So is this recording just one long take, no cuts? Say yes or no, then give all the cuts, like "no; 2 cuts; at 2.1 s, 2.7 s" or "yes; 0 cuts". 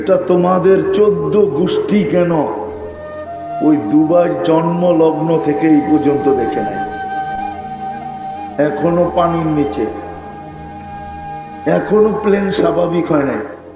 yes; 0 cuts